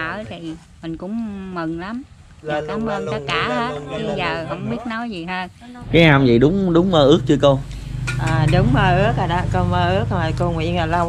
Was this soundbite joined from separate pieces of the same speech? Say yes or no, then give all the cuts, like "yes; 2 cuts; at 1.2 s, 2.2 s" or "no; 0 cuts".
yes; 1 cut; at 5.8 s